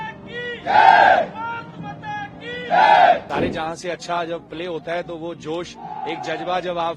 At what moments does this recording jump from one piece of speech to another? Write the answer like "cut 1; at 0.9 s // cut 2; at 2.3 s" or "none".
cut 1; at 3.2 s